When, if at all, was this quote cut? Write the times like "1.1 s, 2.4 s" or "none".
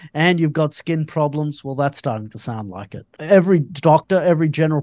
3.1 s